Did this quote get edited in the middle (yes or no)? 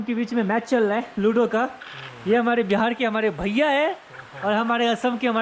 no